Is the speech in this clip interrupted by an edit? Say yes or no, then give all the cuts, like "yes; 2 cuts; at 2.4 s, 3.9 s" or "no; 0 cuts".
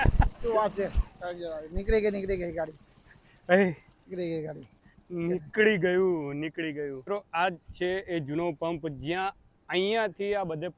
yes; 1 cut; at 7.0 s